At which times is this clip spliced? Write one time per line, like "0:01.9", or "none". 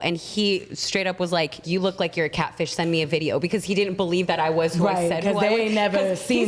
0:01.6